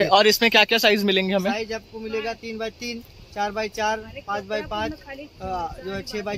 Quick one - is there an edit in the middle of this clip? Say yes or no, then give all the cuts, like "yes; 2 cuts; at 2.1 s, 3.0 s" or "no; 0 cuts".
no; 0 cuts